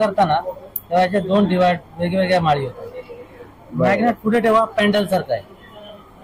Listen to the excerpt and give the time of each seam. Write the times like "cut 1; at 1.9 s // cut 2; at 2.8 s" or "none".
none